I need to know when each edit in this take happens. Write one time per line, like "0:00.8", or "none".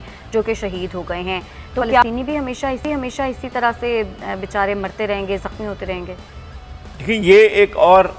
none